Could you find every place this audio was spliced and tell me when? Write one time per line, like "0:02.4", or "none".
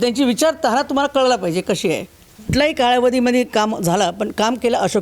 0:02.5